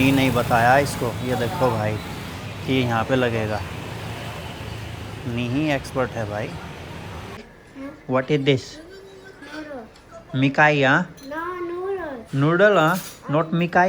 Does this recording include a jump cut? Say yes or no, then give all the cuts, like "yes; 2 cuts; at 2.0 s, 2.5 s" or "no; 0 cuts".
yes; 1 cut; at 7.6 s